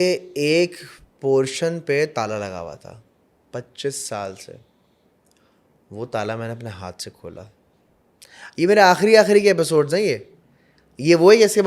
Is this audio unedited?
yes; 0 cuts

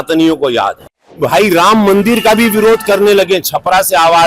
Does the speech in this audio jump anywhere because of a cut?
yes; 1 cut; at 1.2 s

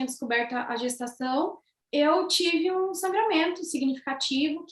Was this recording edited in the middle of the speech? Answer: no; 0 cuts

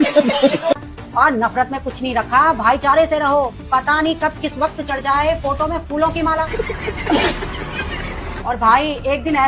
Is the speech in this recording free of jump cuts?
yes; 0 cuts

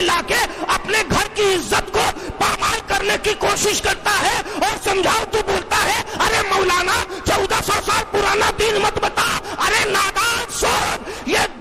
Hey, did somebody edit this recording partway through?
no; 0 cuts

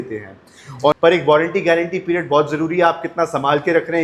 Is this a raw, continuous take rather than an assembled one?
no; 1 cut; at 0.9 s

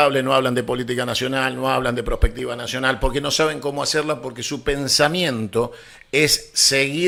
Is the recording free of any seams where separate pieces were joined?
yes; 0 cuts

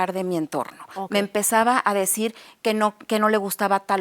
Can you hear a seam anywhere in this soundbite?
no; 0 cuts

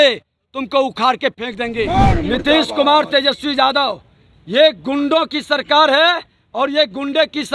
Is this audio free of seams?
no; 1 cut; at 1.9 s

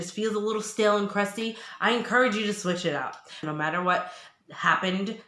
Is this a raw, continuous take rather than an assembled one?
no; 1 cut; at 3.4 s

